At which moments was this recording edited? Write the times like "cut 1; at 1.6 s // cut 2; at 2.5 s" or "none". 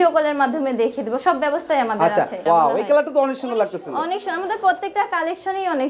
cut 1; at 2.4 s